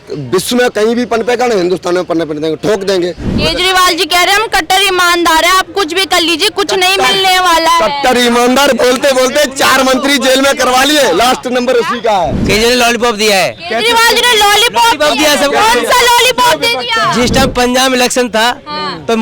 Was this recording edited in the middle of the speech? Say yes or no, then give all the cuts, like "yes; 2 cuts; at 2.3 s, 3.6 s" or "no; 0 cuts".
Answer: yes; 2 cuts; at 3.3 s, 12.4 s